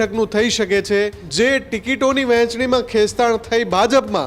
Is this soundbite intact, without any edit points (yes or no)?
no